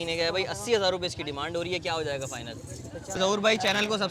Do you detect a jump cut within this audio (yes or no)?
yes